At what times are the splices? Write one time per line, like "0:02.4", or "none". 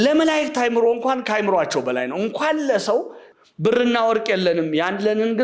0:03.2